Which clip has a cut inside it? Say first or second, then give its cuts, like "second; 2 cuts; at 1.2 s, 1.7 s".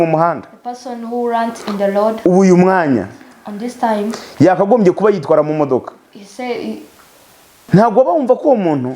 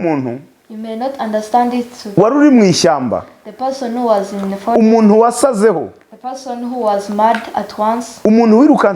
first; 1 cut; at 7.7 s